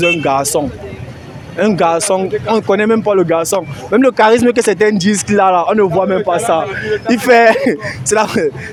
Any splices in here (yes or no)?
no